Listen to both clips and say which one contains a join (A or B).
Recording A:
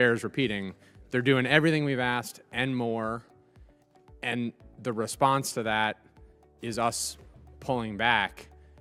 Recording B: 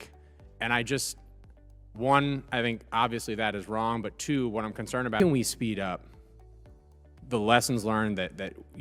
B